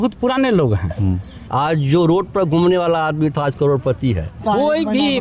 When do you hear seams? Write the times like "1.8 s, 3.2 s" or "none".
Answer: 1.4 s, 4.4 s